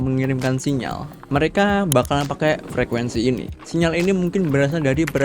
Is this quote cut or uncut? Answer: cut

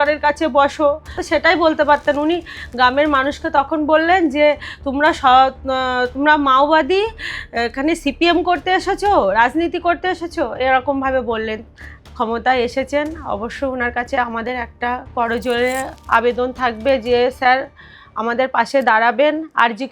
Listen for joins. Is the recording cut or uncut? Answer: cut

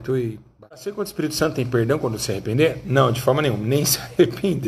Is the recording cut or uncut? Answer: cut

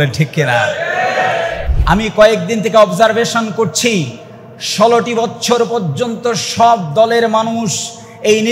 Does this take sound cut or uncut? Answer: cut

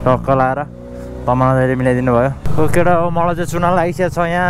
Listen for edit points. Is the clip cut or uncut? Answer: cut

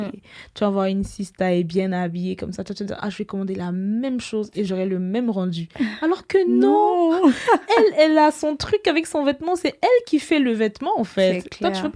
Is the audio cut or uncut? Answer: uncut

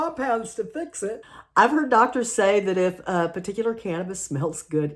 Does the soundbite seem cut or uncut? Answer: cut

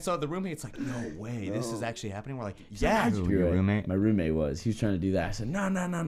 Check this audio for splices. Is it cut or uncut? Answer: cut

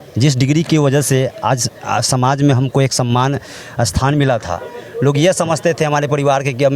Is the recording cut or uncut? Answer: uncut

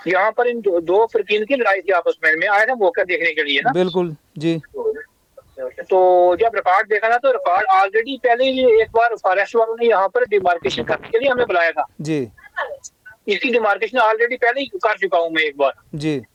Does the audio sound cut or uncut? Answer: uncut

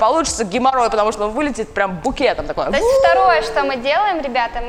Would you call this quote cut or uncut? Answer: uncut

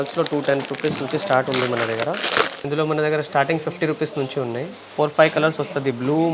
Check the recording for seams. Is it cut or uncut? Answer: cut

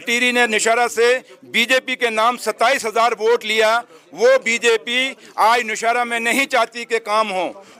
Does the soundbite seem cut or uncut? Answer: uncut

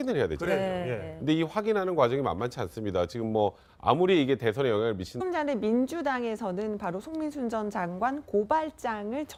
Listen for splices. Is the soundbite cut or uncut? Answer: uncut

